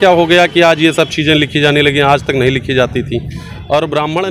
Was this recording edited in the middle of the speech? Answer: no; 0 cuts

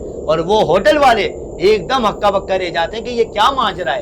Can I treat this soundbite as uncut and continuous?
yes; 0 cuts

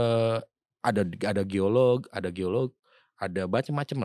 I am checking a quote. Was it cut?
no; 0 cuts

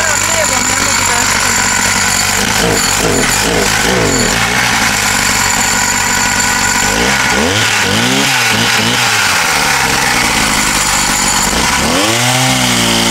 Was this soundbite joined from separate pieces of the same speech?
no; 0 cuts

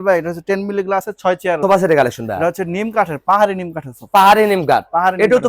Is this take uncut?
no; 1 cut; at 1.6 s

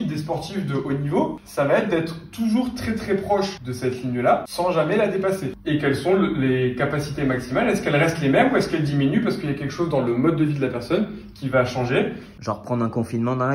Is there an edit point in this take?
yes; 5 cuts; at 1.4 s, 3.6 s, 4.5 s, 5.5 s, 12.3 s

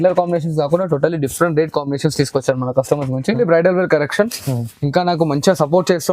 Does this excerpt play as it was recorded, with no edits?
no; 1 cut; at 3.4 s

